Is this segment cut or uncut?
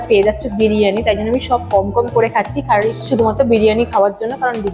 uncut